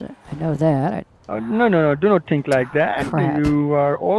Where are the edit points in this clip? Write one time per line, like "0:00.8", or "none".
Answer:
0:01.1

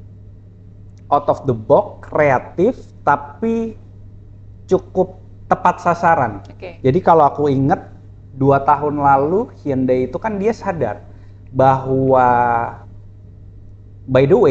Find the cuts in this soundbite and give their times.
none

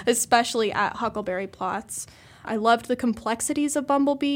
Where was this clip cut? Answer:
0:02.5

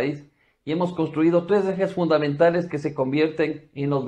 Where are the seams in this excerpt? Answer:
0:01.9

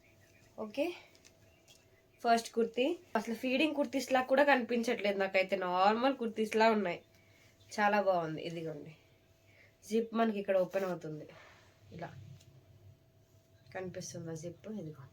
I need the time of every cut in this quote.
0:03.2

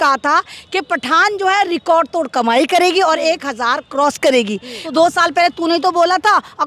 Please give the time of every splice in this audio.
0:04.8

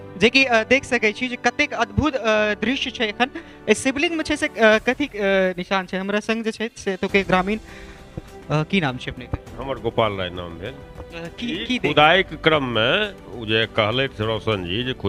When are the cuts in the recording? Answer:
none

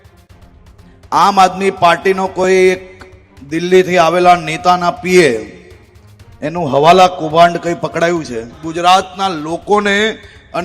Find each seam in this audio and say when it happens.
0:08.6

